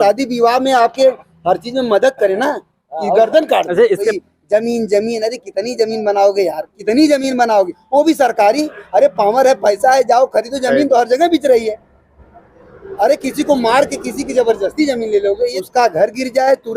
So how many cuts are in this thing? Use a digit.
2